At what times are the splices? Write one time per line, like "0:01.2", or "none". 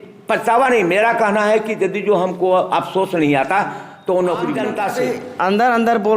0:04.6